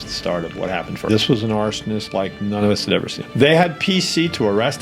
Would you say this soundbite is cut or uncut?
cut